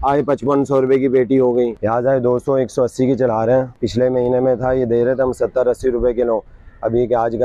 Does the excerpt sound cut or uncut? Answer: cut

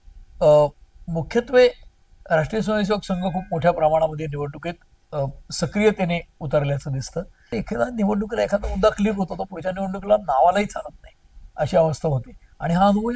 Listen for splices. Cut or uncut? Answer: cut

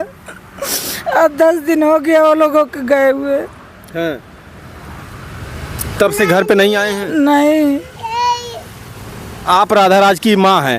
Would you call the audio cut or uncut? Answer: uncut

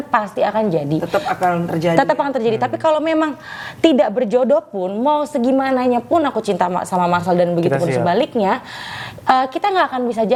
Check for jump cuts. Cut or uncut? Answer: uncut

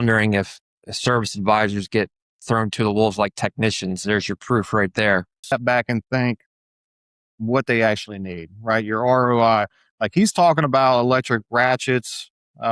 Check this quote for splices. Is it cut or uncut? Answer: cut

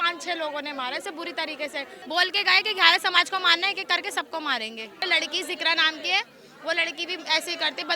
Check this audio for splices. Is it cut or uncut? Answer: cut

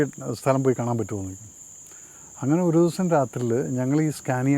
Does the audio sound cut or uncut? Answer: uncut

